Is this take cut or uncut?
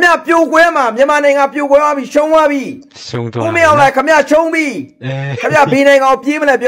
uncut